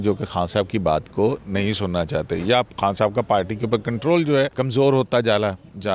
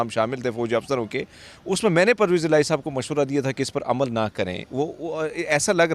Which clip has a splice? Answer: first; 1 cut; at 4.5 s

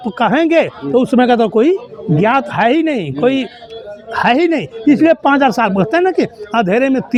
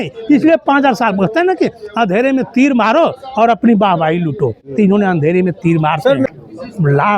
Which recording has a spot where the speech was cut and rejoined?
second; 1 cut; at 6.3 s

